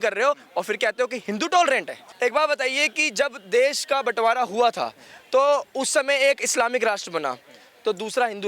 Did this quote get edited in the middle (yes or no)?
yes